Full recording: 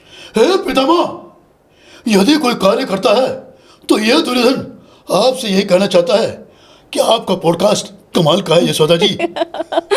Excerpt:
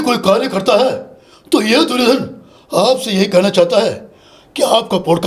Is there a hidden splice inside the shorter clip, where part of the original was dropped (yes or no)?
no